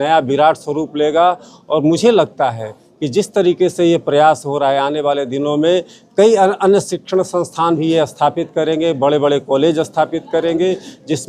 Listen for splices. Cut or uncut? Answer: uncut